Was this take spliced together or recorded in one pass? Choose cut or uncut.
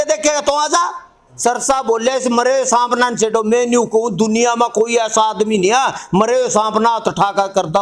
cut